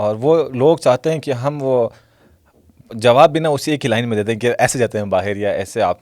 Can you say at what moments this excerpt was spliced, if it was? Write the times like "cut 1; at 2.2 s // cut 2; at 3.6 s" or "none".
none